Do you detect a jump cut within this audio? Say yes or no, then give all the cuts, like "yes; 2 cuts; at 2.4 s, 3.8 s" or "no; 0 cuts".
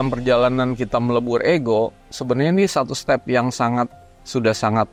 no; 0 cuts